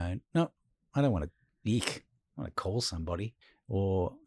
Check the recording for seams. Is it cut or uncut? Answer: cut